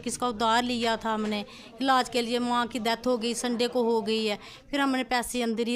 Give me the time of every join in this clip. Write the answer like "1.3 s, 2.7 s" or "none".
none